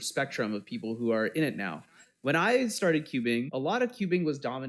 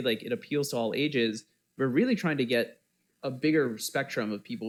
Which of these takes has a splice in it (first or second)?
first